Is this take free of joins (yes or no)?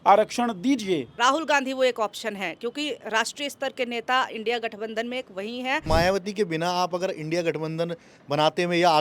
no